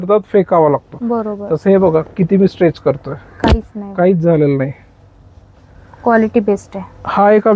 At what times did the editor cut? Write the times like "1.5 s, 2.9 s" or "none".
none